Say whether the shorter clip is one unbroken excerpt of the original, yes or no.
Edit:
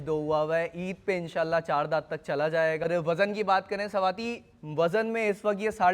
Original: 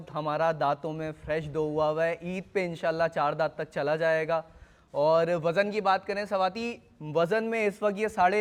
no